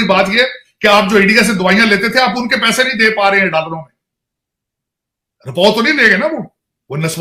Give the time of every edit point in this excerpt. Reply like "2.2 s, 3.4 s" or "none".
none